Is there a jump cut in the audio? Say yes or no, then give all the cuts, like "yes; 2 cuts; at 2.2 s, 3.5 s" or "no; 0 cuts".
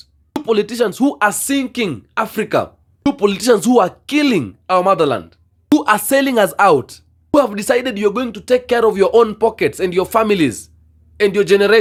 no; 0 cuts